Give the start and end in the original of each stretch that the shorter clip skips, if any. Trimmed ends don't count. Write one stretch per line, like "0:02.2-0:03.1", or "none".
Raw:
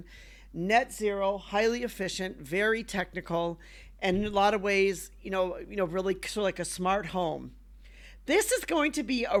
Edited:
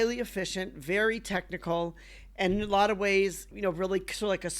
0:05.1-0:05.6